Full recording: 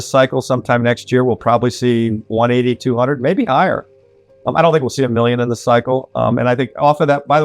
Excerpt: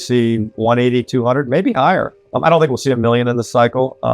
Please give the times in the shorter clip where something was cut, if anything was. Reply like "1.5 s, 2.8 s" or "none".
2.2 s